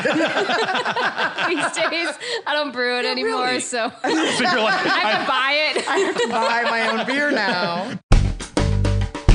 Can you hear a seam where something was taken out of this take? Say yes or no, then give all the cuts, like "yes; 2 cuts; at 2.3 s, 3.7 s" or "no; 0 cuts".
yes; 1 cut; at 7.9 s